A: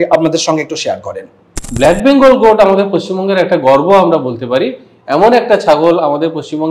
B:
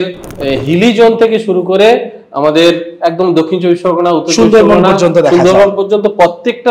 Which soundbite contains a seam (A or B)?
A